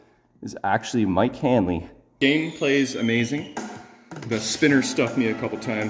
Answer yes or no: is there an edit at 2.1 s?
yes